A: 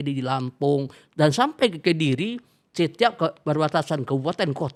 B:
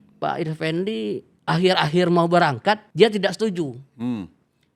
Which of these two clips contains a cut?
B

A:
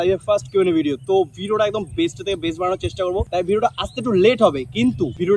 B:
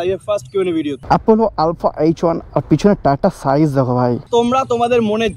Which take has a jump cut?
B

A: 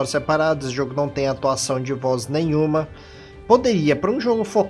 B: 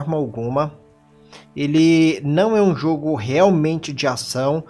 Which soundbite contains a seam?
B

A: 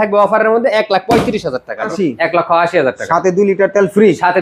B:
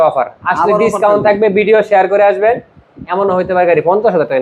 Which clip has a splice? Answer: A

